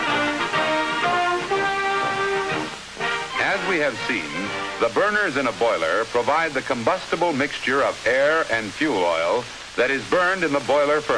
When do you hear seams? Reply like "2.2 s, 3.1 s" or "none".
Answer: none